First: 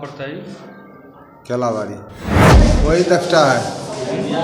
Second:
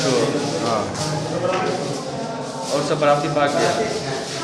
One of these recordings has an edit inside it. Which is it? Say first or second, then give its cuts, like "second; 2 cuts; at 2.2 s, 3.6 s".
first; 1 cut; at 2.5 s